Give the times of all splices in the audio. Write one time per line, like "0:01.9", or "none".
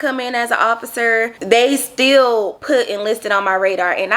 0:02.6

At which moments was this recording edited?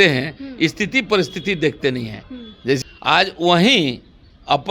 0:02.8

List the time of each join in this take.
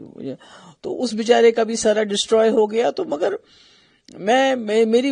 none

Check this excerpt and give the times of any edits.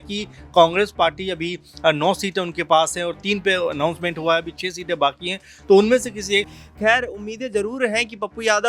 0:06.6

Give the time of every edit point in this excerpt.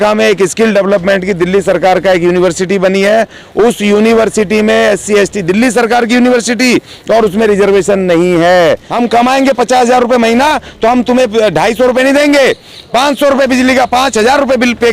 0:08.9

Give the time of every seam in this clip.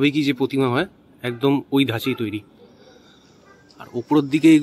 none

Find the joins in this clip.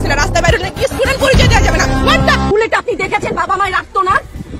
0:02.5

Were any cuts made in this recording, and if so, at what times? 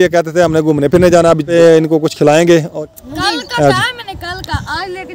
0:01.5
0:02.7

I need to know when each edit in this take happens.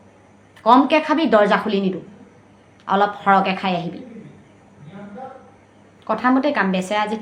none

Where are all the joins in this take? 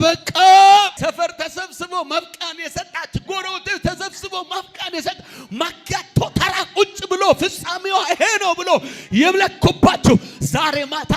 0:00.9

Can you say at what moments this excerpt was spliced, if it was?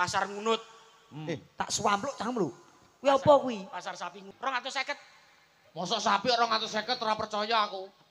0:04.2

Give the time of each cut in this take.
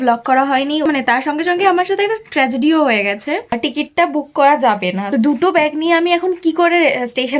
0:00.9
0:03.6
0:05.0

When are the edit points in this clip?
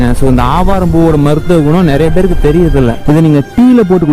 0:03.0

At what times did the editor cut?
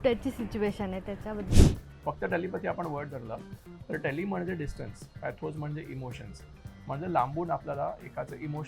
0:01.5

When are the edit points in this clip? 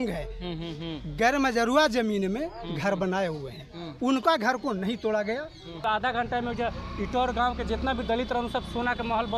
0:05.8

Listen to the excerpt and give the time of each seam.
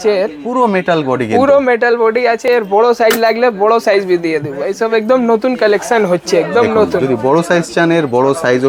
none

